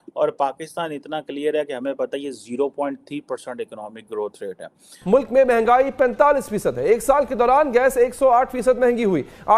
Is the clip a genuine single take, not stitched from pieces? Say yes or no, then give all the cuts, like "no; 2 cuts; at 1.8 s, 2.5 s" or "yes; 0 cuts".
no; 1 cut; at 4.9 s